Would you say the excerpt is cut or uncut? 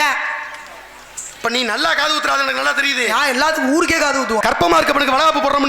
cut